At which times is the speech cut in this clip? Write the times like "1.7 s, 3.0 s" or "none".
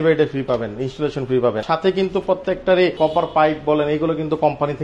1.6 s, 2.9 s